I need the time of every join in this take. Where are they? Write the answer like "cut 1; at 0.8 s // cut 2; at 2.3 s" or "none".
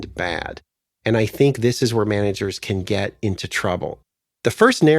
cut 1; at 4.0 s